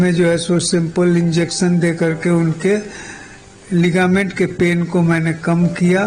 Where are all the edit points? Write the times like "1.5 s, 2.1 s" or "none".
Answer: none